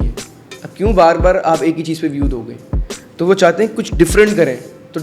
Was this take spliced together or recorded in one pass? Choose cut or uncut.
uncut